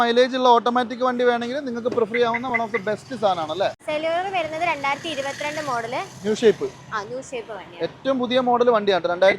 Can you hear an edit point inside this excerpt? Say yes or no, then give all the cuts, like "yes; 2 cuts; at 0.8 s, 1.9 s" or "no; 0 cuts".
yes; 1 cut; at 3.8 s